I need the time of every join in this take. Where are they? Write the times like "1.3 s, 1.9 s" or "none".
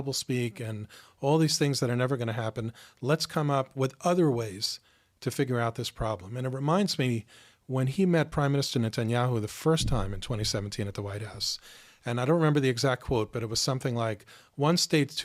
none